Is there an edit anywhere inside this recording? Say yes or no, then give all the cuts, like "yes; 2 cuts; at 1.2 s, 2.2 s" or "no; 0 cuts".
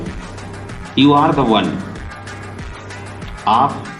no; 0 cuts